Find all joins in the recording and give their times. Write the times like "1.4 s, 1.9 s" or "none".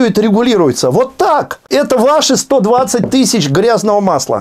1.6 s